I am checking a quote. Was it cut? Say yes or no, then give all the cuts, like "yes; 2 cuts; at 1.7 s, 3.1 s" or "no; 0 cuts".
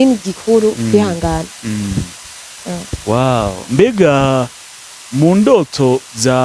no; 0 cuts